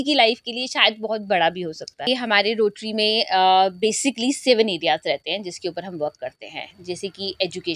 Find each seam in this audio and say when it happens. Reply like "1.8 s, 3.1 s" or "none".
2.1 s